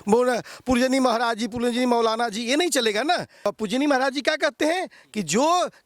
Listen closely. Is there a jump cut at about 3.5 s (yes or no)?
yes